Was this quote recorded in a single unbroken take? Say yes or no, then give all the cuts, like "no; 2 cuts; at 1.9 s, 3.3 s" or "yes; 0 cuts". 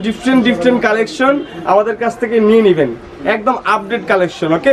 yes; 0 cuts